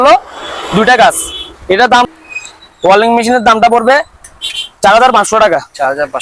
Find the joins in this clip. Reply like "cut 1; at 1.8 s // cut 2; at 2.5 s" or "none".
cut 1; at 2.1 s